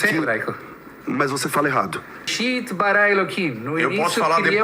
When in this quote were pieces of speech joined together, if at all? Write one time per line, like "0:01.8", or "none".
0:02.3